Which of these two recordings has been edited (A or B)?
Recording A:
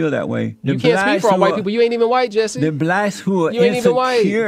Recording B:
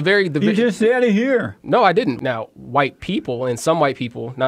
B